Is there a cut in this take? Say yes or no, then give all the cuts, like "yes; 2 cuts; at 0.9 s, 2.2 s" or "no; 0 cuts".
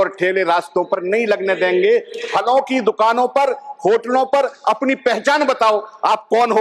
no; 0 cuts